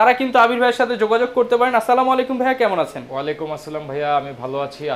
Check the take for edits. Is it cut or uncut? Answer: uncut